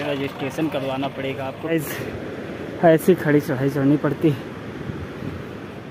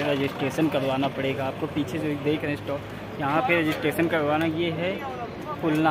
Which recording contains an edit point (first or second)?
first